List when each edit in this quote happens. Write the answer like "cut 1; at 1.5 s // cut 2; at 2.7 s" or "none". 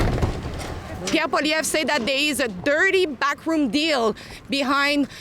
cut 1; at 1.0 s